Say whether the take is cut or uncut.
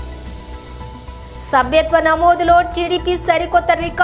cut